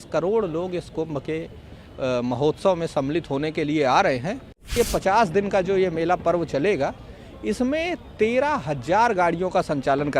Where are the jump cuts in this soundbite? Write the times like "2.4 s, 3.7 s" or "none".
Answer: 4.7 s